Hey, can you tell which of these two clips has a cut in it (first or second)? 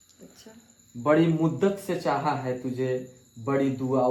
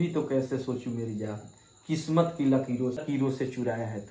second